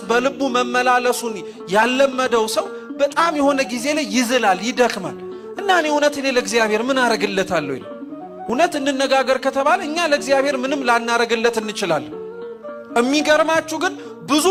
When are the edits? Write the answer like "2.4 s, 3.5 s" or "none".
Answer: none